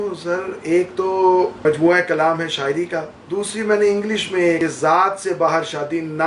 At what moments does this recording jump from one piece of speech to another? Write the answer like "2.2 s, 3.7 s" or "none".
1.6 s, 3.2 s, 4.6 s